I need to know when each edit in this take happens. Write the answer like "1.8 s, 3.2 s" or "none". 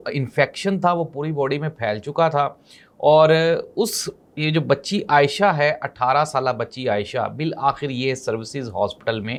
none